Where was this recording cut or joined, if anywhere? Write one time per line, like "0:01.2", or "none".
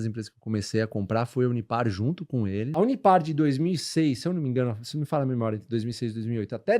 0:02.6